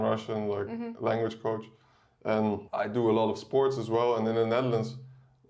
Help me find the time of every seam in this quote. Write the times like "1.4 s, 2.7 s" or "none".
2.7 s